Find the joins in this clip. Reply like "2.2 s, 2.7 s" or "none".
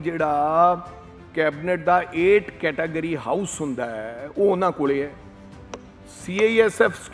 none